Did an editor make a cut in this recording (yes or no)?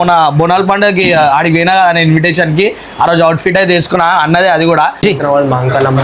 no